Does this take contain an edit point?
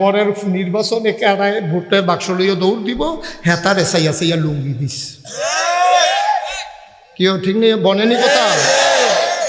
no; 0 cuts

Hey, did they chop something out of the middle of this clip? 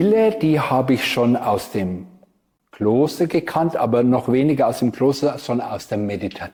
no; 0 cuts

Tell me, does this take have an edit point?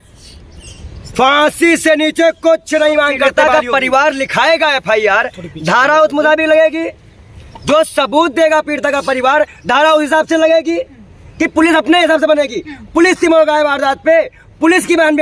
yes; 1 cut; at 3.2 s

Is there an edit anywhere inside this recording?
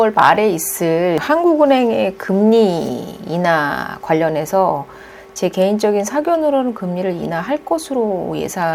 yes; 1 cut; at 1.2 s

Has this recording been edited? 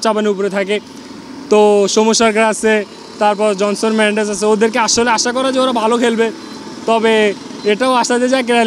no; 0 cuts

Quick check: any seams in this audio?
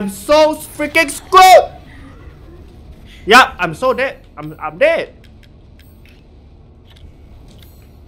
no; 0 cuts

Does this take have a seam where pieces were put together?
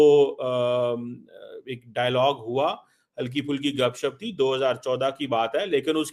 no; 0 cuts

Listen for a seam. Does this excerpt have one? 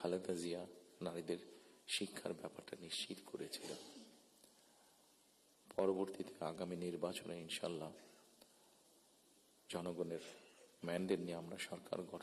no; 0 cuts

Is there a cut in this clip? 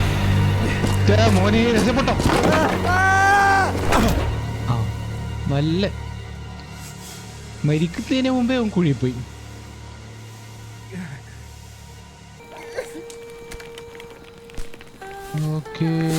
yes; 1 cut; at 12.4 s

